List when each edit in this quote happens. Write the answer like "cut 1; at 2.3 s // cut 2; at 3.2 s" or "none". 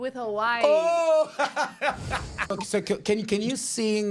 cut 1; at 2.5 s